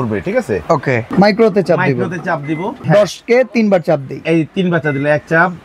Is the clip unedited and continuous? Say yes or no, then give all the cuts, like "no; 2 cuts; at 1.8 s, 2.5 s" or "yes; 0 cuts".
no; 2 cuts; at 1.1 s, 2.8 s